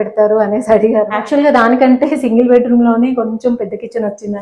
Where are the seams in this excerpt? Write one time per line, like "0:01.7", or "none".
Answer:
0:01.2